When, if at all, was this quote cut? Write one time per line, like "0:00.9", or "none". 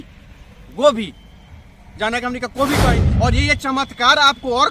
0:02.9